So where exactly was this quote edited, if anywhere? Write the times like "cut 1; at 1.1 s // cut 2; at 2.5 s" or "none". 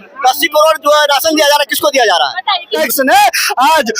cut 1; at 2.7 s